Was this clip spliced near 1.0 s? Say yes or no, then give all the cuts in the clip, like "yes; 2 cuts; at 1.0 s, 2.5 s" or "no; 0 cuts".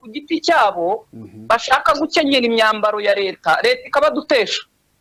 no; 0 cuts